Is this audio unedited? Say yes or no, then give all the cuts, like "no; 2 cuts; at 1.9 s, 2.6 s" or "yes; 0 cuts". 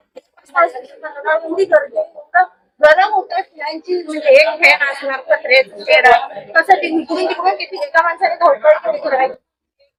yes; 0 cuts